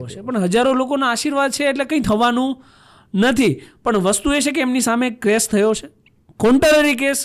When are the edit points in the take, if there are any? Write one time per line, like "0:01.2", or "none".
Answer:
none